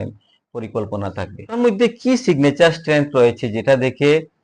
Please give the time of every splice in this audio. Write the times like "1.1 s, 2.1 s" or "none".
1.5 s